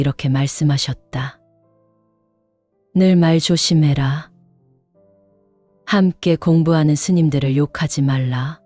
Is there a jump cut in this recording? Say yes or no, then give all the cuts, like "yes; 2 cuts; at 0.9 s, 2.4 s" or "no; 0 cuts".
yes; 2 cuts; at 4.3 s, 5.9 s